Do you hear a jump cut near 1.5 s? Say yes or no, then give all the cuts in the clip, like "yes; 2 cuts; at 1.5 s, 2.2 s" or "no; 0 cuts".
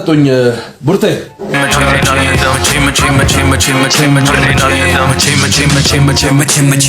yes; 1 cut; at 1.5 s